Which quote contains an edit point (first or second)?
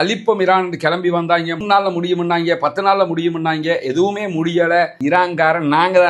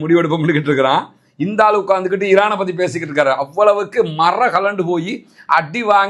first